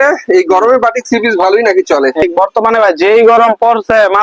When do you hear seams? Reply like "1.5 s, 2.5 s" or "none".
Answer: 2.2 s